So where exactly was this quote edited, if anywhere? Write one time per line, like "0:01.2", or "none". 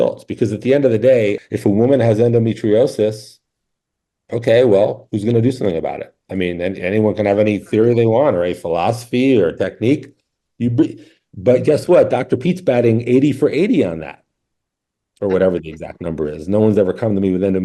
0:01.5